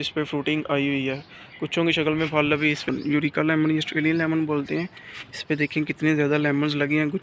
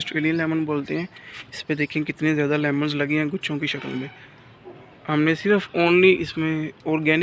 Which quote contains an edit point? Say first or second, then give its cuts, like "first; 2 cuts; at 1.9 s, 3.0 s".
first; 1 cut; at 2.9 s